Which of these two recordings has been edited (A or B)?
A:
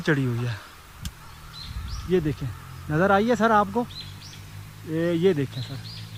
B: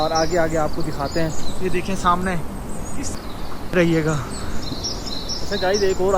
B